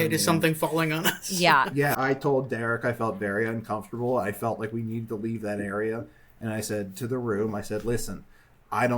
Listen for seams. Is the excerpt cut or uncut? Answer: cut